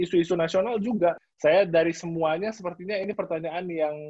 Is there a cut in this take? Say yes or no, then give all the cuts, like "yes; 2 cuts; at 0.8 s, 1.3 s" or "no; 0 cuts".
yes; 1 cut; at 1.3 s